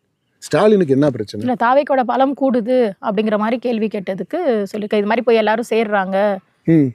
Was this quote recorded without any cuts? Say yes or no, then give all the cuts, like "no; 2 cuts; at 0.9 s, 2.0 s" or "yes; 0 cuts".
yes; 0 cuts